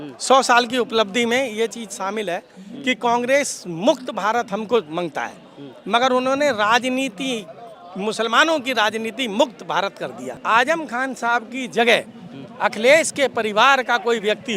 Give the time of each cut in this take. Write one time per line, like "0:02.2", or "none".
0:10.3